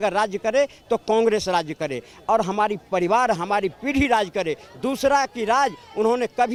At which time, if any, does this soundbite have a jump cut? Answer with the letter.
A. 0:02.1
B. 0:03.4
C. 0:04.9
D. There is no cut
D